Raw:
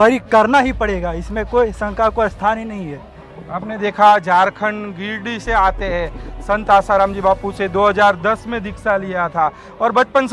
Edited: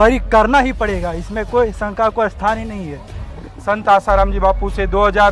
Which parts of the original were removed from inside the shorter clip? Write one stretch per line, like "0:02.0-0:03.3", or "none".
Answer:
0:03.4-0:06.2